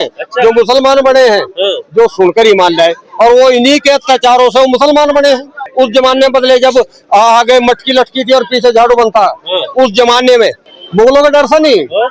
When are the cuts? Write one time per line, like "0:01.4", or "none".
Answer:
0:05.6
0:10.6